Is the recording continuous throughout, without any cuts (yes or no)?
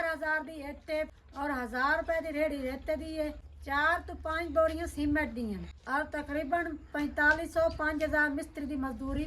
no